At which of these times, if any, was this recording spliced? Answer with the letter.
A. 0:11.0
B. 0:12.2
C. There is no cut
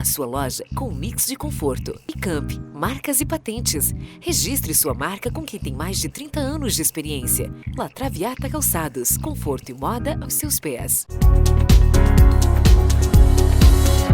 A